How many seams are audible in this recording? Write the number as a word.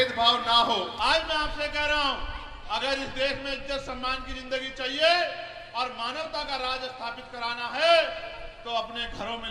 one